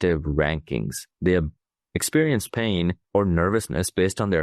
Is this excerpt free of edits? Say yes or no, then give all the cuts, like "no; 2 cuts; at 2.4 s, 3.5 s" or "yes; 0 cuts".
no; 2 cuts; at 1.0 s, 3.0 s